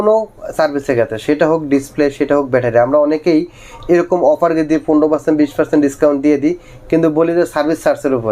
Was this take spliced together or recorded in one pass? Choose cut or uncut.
uncut